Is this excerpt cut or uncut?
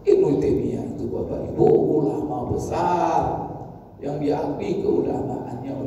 uncut